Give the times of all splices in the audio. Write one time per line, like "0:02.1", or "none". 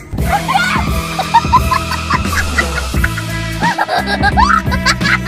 none